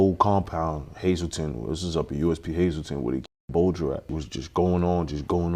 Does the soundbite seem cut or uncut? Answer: cut